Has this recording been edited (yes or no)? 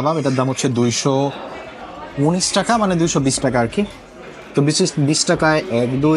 no